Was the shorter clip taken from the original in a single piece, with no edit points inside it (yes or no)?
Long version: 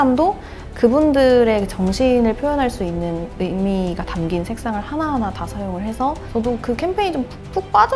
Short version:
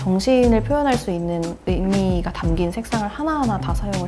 yes